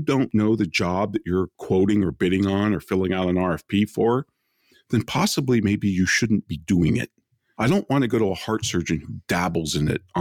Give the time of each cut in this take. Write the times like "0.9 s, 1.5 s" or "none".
none